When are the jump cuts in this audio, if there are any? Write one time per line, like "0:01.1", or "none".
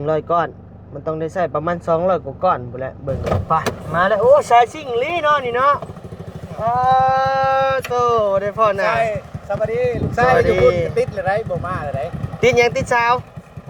0:03.2